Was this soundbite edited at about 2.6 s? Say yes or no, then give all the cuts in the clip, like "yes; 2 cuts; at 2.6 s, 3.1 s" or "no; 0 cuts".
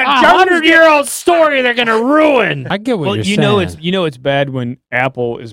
yes; 1 cut; at 2.6 s